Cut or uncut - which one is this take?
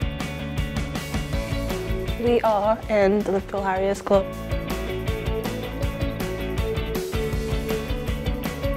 cut